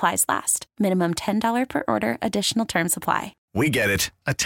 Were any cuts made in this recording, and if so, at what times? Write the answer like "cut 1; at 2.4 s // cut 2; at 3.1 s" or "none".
cut 1; at 3.4 s

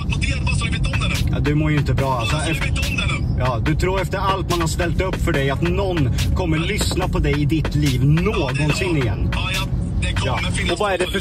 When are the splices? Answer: none

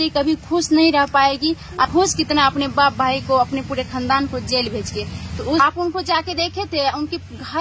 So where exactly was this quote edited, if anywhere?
cut 1; at 1.8 s // cut 2; at 5.6 s

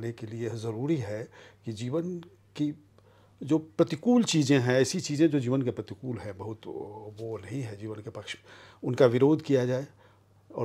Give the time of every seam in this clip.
none

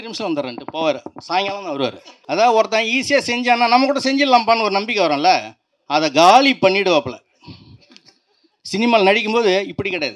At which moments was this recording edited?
cut 1; at 2.1 s

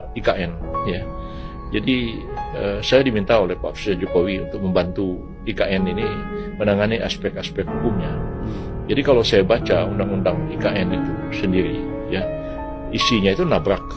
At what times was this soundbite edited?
none

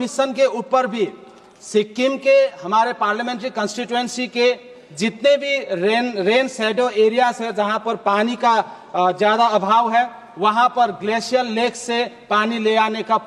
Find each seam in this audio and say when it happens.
none

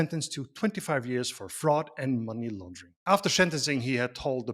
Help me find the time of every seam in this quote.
cut 1; at 3.0 s

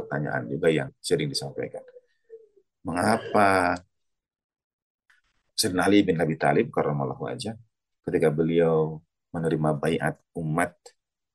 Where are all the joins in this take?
cut 1; at 0.9 s

